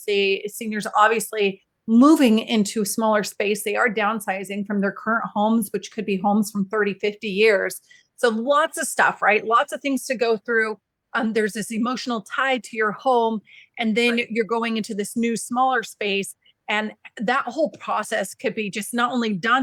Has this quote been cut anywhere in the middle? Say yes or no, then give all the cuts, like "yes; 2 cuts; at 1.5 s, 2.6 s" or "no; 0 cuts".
no; 0 cuts